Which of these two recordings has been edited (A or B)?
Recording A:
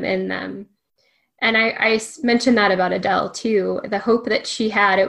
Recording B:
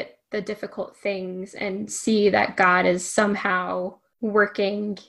B